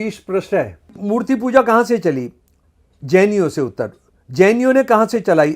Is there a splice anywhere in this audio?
yes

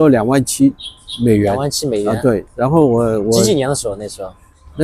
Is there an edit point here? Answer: no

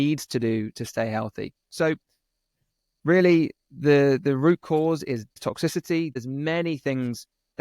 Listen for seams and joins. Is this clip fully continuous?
no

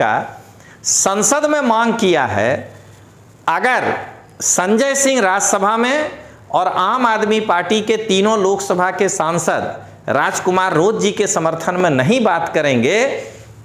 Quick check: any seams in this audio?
no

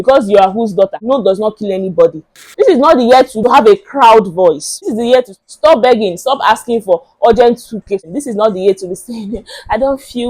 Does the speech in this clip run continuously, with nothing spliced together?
no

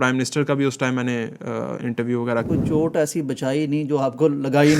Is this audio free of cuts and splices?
no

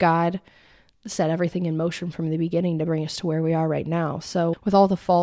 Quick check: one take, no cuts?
yes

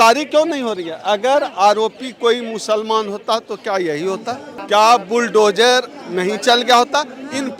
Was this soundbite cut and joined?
no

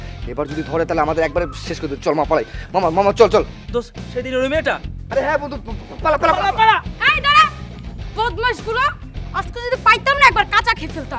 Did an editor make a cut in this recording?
no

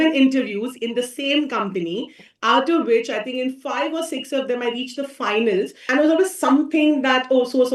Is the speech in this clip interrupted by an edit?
yes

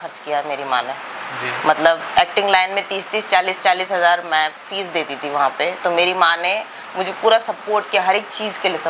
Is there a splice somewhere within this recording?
no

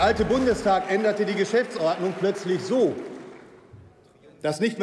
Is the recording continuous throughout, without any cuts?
yes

